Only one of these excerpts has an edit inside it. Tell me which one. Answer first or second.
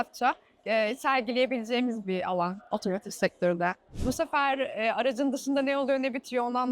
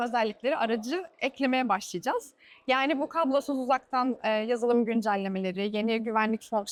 first